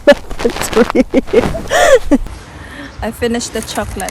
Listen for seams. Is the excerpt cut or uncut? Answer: cut